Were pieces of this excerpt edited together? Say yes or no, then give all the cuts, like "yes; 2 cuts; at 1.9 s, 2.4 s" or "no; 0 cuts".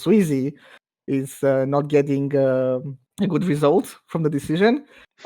yes; 1 cut; at 3.0 s